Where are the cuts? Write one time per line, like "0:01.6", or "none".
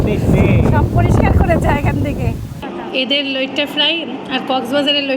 0:02.6